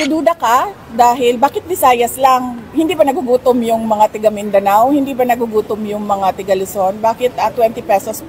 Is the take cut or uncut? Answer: uncut